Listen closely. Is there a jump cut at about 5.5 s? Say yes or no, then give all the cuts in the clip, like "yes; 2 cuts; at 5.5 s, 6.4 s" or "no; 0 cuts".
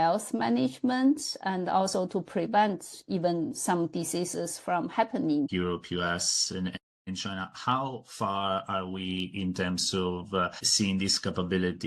yes; 1 cut; at 5.5 s